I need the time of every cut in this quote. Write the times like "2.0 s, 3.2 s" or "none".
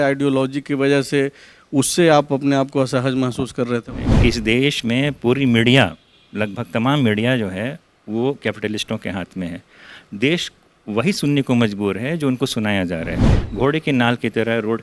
4.0 s, 13.2 s